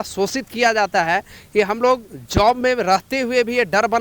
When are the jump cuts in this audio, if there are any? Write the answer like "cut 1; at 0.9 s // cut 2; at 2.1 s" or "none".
none